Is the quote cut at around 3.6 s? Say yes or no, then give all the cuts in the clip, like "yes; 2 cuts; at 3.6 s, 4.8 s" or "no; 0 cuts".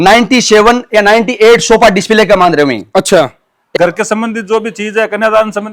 yes; 1 cut; at 3.6 s